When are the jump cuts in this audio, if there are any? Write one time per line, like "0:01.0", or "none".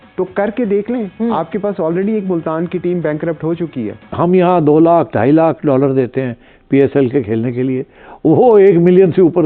0:04.1